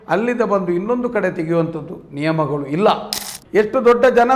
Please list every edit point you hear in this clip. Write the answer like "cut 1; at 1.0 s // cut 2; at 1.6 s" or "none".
cut 1; at 3.3 s